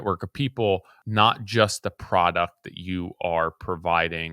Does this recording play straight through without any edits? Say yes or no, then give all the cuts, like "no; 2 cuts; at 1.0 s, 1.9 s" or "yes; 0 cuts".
no; 1 cut; at 1.0 s